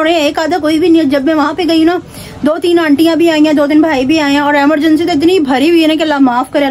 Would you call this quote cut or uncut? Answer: uncut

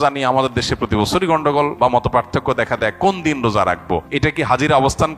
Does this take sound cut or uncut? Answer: cut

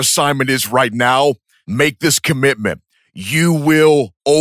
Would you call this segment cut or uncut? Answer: cut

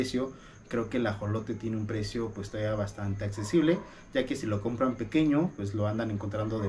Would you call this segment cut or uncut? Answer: uncut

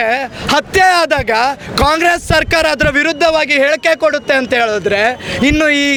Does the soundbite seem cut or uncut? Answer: uncut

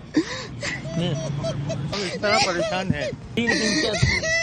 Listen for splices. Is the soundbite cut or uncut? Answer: cut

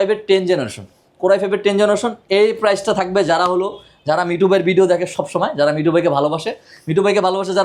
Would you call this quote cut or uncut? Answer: uncut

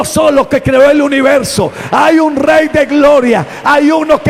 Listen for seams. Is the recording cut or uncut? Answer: uncut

